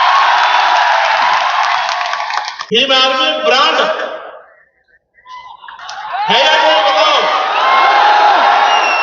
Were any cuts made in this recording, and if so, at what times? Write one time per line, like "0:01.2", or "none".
0:02.6